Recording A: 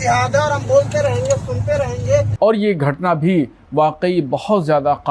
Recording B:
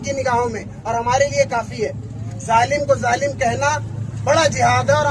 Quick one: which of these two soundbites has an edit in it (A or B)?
A